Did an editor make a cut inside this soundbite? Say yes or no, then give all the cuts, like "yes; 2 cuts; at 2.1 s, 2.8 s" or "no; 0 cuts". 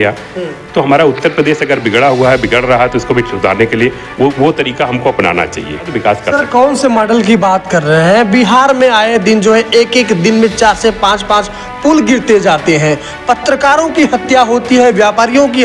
yes; 1 cut; at 5.9 s